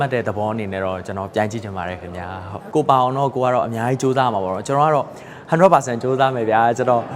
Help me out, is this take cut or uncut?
cut